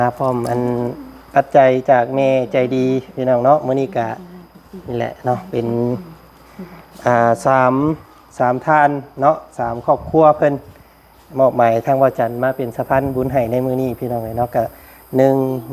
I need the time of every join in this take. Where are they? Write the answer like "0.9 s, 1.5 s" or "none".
none